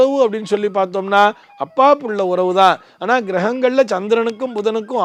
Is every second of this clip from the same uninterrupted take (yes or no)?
yes